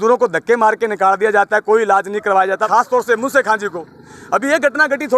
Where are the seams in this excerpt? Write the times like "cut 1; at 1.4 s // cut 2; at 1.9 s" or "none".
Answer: cut 1; at 2.6 s